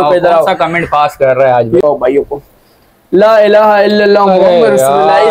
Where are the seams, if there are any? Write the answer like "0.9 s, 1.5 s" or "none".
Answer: 1.8 s